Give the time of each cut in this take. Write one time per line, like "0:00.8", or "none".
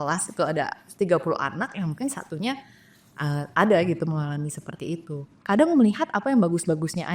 0:05.4